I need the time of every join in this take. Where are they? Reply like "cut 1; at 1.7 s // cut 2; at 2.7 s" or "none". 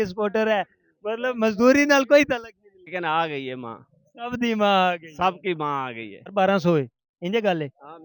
cut 1; at 2.9 s // cut 2; at 6.2 s